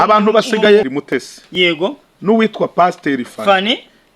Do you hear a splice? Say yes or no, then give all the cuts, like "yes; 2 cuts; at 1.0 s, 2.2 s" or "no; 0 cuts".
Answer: yes; 1 cut; at 0.9 s